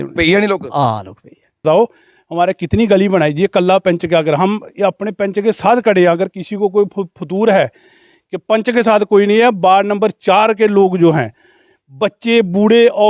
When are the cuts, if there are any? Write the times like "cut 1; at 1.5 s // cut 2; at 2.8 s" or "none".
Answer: cut 1; at 1.6 s